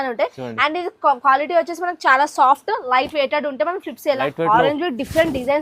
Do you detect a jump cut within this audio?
yes; 1 cut; at 4.2 s

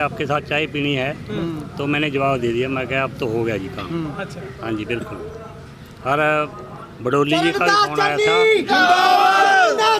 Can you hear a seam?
no; 0 cuts

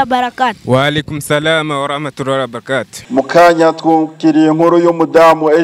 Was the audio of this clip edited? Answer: yes; 1 cut; at 3.0 s

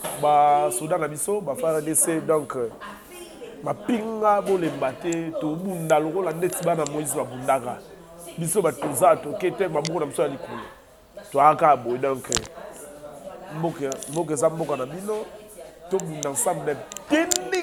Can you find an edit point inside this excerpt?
no; 0 cuts

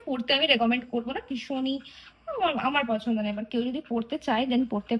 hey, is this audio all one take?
yes; 0 cuts

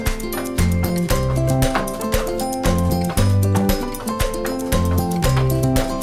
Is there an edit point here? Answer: no; 0 cuts

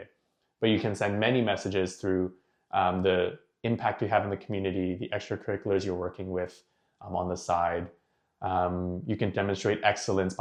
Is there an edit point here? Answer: no; 0 cuts

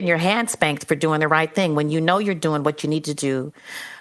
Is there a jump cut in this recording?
no; 0 cuts

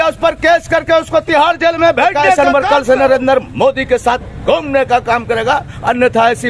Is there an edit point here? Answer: yes; 1 cut; at 2.2 s

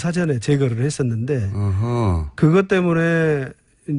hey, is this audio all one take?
no; 1 cut; at 2.2 s

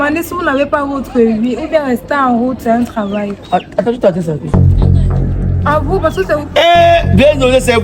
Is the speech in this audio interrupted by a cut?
no; 0 cuts

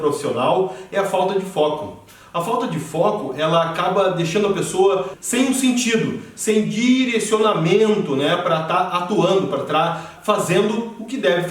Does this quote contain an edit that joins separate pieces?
yes; 2 cuts; at 5.2 s, 10.1 s

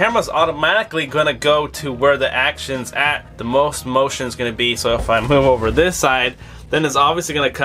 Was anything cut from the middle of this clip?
no; 0 cuts

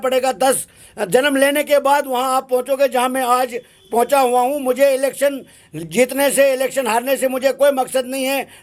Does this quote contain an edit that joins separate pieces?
no; 0 cuts

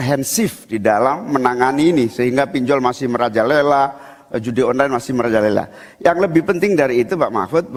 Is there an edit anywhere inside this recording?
no; 0 cuts

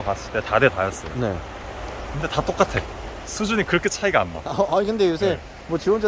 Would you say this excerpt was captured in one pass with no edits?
yes; 0 cuts

